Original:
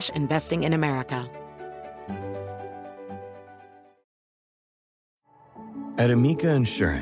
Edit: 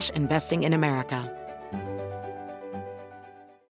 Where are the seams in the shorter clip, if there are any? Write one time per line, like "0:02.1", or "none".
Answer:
0:01.2